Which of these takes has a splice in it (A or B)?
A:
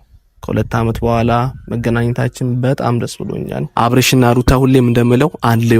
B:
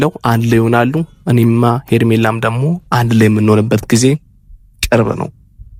A